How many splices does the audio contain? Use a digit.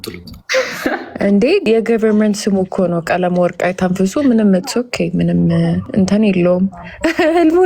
2